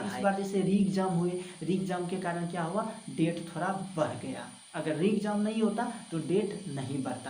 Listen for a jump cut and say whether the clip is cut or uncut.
uncut